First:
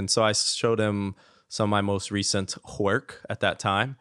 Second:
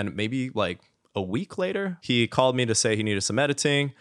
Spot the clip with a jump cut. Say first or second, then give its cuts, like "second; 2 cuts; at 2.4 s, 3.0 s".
second; 1 cut; at 2.0 s